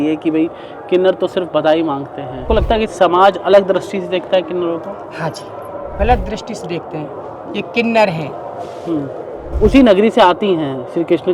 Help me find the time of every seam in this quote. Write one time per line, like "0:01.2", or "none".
0:02.4
0:05.9
0:09.5